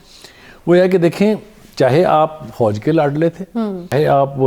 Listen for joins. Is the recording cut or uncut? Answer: uncut